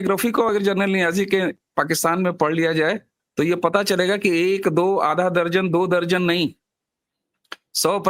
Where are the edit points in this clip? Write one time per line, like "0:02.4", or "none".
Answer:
none